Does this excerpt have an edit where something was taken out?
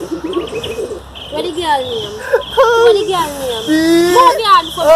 no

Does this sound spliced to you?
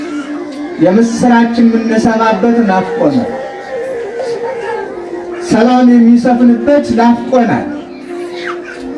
no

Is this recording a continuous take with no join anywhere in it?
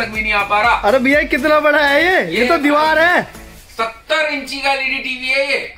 yes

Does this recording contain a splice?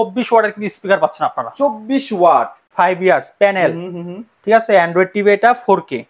yes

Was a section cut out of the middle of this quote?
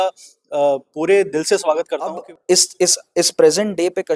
yes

